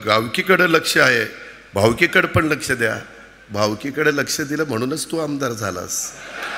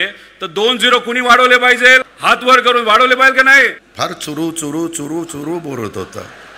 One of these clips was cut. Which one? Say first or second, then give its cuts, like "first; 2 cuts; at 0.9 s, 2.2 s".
second; 2 cuts; at 2.1 s, 3.8 s